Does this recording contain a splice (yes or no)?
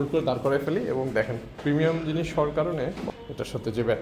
yes